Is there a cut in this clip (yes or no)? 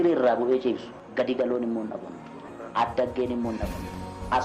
yes